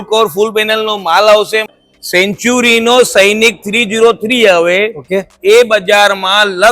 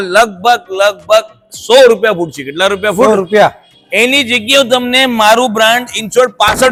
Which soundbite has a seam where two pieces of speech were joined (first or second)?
first